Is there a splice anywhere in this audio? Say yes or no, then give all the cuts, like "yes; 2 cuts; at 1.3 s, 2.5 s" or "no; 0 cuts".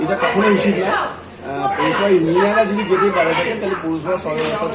no; 0 cuts